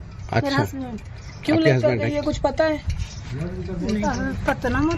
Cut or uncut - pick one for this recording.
cut